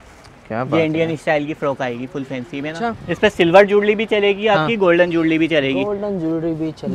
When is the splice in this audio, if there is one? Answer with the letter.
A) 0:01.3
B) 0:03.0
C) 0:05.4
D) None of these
B